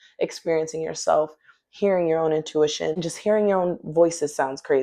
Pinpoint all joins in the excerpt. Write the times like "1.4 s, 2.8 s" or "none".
3.1 s